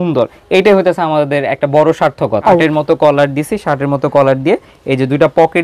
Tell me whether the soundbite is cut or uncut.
cut